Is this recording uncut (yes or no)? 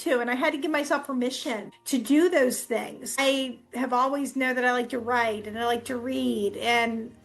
no